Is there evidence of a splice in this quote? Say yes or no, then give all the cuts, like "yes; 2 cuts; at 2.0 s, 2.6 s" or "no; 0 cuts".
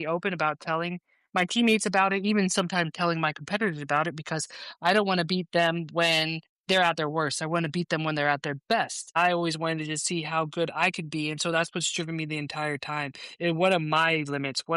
yes; 1 cut; at 9.1 s